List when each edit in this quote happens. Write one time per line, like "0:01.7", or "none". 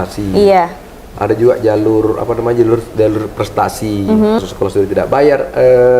0:04.4